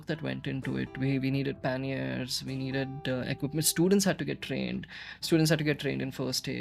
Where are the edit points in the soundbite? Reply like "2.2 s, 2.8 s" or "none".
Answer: none